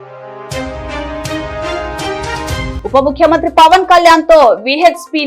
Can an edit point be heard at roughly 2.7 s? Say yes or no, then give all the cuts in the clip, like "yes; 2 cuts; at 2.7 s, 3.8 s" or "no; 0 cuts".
yes; 1 cut; at 2.7 s